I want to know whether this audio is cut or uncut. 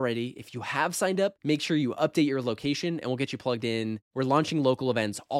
uncut